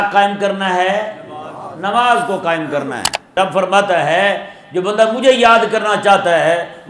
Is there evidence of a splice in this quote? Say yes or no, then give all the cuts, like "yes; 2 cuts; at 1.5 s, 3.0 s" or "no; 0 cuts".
yes; 1 cut; at 3.3 s